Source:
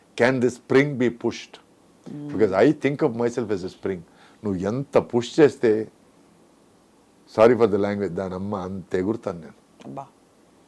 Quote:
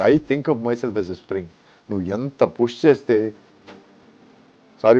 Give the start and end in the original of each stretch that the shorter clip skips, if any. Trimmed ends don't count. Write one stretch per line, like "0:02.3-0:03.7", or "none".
none